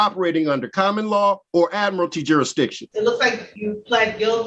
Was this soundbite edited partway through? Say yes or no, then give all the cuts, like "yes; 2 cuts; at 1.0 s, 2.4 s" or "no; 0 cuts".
yes; 3 cuts; at 1.4 s, 2.8 s, 3.5 s